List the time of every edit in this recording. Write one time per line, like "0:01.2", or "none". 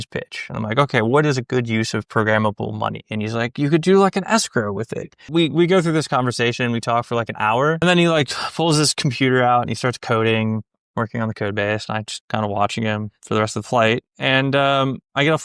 0:05.2
0:07.8